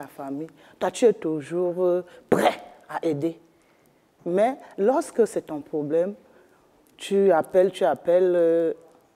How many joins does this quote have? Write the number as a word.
zero